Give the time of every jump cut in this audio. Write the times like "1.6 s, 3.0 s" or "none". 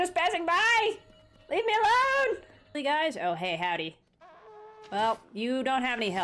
2.8 s